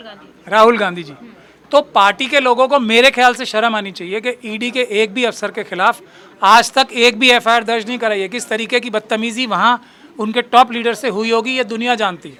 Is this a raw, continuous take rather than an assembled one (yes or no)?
yes